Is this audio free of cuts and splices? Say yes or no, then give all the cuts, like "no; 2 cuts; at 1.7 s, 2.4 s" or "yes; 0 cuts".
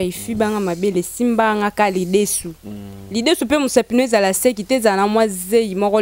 yes; 0 cuts